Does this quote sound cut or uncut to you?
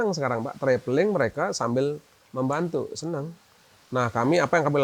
uncut